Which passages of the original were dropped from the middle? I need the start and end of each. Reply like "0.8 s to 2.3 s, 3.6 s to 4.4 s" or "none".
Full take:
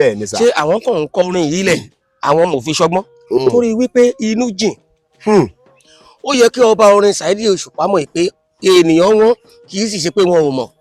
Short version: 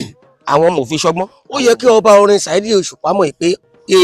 3.1 s to 6.1 s